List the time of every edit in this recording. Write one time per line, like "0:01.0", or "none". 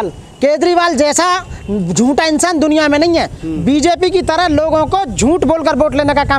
none